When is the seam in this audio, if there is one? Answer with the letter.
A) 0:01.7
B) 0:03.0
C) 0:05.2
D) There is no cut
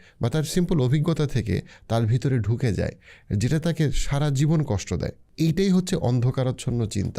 C